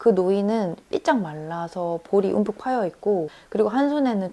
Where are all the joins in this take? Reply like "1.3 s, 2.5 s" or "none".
3.4 s